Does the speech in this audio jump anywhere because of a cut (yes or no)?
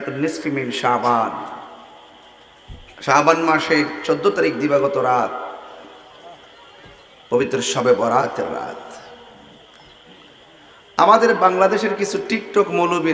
no